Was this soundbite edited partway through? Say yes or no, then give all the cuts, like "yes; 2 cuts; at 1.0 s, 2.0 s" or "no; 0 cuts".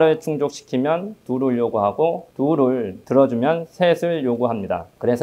no; 0 cuts